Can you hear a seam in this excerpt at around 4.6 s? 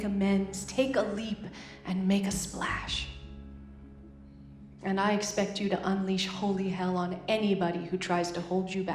yes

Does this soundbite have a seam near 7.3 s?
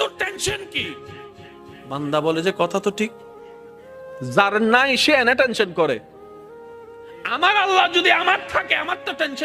yes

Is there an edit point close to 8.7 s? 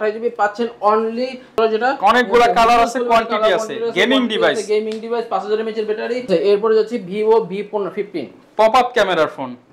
no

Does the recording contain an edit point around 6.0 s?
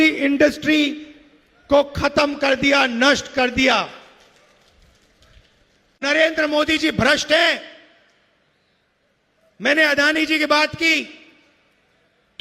yes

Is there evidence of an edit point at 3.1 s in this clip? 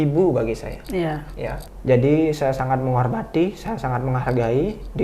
no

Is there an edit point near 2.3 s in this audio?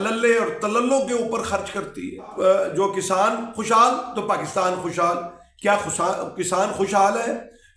yes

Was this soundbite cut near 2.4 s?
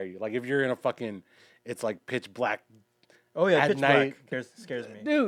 no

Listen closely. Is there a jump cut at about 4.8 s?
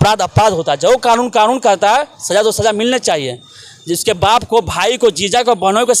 no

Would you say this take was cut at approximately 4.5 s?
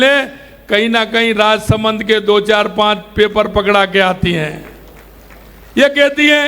no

